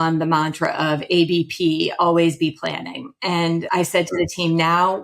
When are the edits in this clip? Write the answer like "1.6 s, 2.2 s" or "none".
3.7 s